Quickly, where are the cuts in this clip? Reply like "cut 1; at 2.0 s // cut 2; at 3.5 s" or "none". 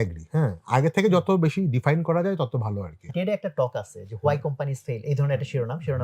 cut 1; at 3.0 s